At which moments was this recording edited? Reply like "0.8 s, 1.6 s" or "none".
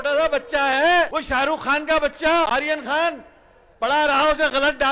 1.2 s, 2.5 s

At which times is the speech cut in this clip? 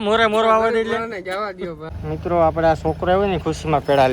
1.9 s

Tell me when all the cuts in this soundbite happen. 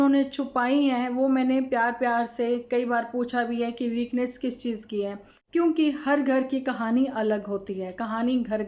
5.3 s

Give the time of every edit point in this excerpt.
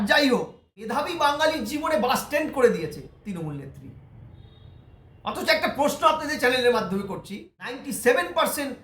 0.9 s, 7.8 s

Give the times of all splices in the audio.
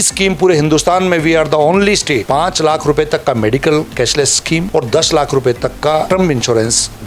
2.2 s, 4.7 s, 6.1 s

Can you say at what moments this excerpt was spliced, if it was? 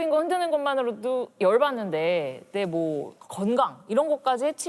3.1 s

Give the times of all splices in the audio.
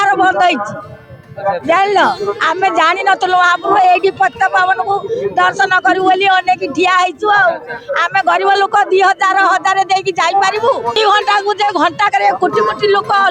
11.0 s

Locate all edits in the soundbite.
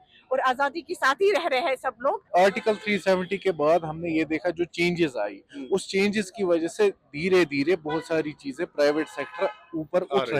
2.2 s

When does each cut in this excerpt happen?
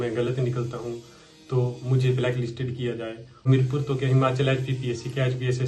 3.4 s

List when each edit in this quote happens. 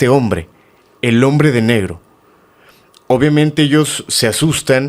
none

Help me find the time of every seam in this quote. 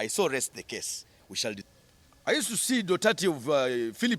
1.6 s

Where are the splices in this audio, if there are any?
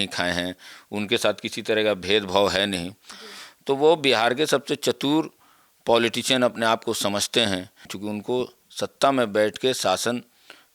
7.9 s

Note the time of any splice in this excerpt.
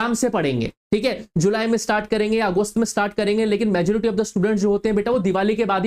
none

